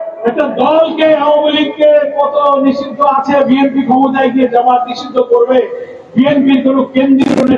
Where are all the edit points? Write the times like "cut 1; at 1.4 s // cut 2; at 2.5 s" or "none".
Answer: none